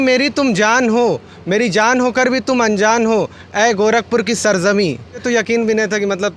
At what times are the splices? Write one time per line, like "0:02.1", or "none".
0:05.2